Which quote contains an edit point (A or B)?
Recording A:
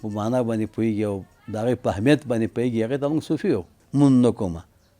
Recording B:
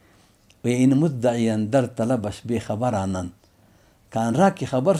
A